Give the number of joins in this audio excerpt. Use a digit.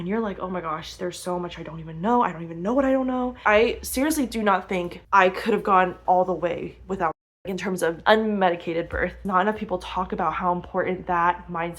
3